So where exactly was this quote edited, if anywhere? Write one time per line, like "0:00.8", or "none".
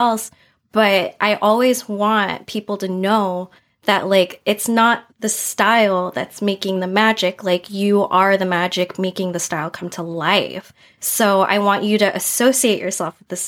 none